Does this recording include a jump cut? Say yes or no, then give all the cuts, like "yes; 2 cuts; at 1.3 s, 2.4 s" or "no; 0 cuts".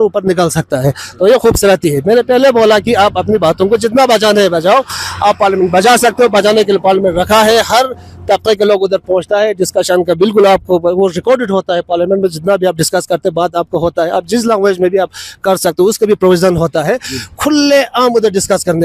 no; 0 cuts